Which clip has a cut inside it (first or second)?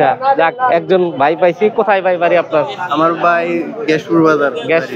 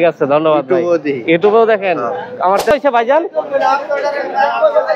second